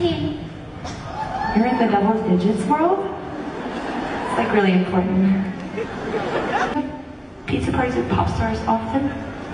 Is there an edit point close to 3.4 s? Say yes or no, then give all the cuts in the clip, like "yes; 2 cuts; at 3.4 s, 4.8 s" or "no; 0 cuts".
no; 0 cuts